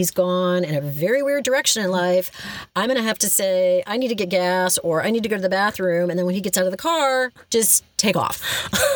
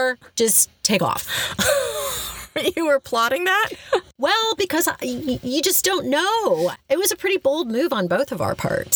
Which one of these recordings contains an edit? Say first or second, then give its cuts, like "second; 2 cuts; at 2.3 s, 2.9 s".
second; 1 cut; at 6.7 s